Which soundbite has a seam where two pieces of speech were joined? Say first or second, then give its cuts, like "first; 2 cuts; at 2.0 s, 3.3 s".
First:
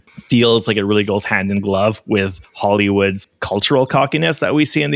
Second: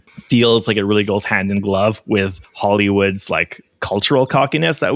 first; 1 cut; at 3.3 s